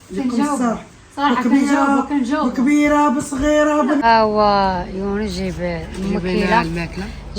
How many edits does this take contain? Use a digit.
1